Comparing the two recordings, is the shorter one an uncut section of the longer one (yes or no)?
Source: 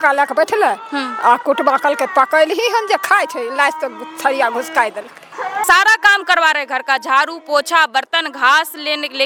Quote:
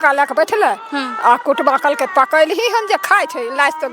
yes